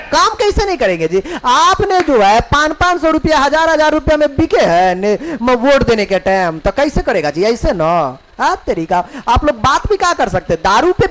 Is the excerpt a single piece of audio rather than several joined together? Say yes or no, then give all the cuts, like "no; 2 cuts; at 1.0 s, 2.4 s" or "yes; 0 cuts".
yes; 0 cuts